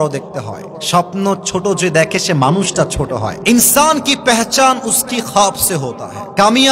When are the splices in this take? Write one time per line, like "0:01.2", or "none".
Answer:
0:03.4